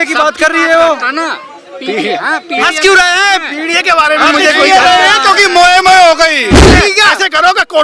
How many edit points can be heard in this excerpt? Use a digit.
1